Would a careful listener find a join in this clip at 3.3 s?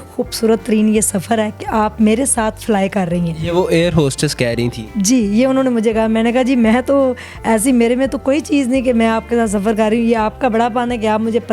no; 0 cuts

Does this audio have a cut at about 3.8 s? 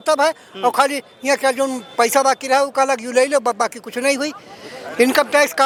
no; 0 cuts

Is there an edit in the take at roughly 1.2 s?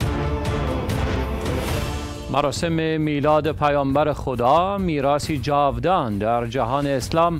yes; 1 cut; at 1.2 s

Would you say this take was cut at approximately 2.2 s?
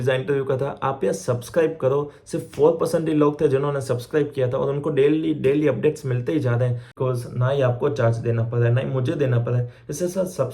no; 1 cut; at 6.9 s

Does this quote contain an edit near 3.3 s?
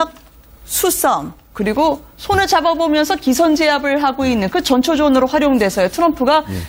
no; 0 cuts

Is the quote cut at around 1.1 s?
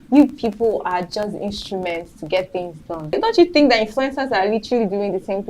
no; 1 cut; at 3.1 s

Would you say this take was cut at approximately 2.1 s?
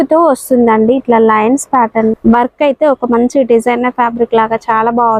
yes; 1 cut; at 2.1 s

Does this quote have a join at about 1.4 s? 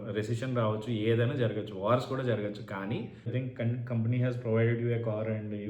no; 1 cut; at 3.3 s

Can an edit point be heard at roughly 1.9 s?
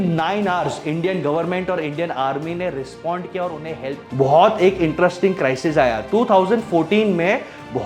no; 1 cut; at 3.9 s

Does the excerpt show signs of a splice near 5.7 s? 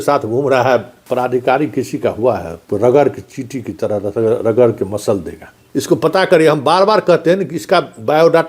yes; 2 cuts; at 1.0 s, 5.7 s

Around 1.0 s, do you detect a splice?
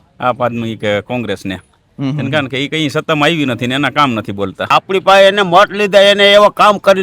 no; 1 cut; at 4.7 s

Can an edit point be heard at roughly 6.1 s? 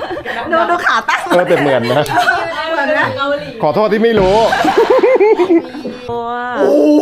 yes; 1 cut; at 6.1 s

